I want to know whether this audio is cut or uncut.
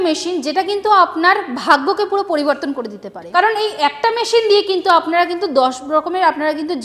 cut